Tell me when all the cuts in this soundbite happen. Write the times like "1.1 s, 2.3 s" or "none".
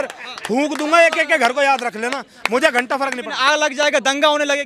none